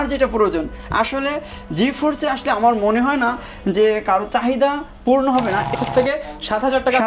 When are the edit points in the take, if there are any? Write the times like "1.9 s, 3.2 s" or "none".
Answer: 5.7 s